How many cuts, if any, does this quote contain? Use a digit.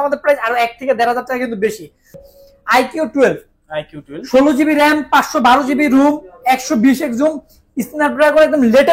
1